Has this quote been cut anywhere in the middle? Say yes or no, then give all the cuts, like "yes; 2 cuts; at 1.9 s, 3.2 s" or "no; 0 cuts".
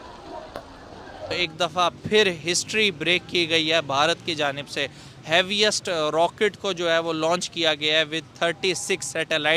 yes; 1 cut; at 1.4 s